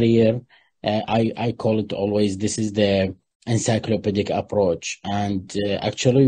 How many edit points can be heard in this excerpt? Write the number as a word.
zero